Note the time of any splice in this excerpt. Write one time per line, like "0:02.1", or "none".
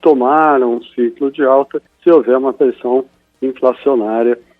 0:01.8